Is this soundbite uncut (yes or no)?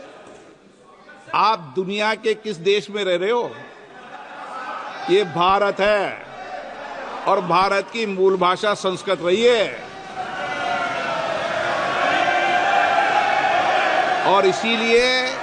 yes